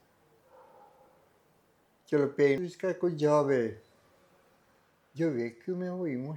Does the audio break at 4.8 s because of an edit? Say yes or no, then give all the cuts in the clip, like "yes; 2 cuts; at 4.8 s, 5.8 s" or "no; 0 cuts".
no; 1 cut; at 2.6 s